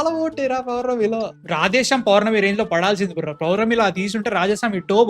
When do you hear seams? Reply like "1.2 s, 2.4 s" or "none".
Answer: 1.4 s